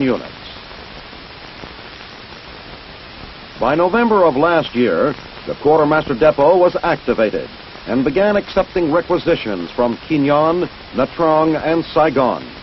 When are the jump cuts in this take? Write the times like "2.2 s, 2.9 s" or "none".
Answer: 8.8 s